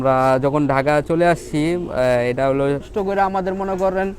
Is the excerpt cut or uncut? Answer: cut